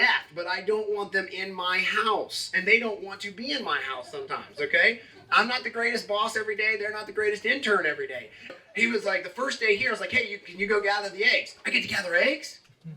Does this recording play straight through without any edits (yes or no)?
no